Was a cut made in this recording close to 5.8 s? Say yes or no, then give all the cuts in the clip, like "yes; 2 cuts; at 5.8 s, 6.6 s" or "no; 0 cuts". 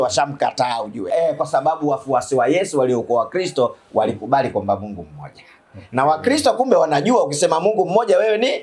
no; 1 cut; at 1.0 s